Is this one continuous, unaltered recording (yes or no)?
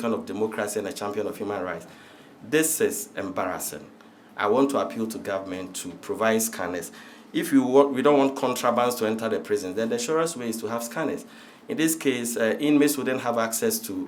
yes